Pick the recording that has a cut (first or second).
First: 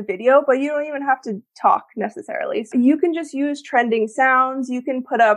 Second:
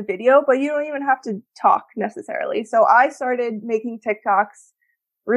first